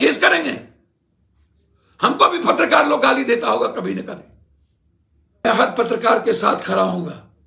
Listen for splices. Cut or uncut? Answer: cut